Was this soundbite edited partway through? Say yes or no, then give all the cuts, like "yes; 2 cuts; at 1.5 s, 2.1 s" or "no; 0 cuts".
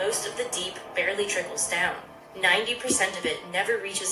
no; 0 cuts